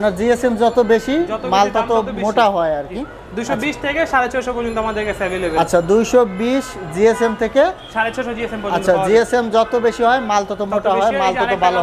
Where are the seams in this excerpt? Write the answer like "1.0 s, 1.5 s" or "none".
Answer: none